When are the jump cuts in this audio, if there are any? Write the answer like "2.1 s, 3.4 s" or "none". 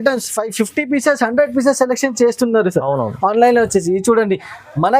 none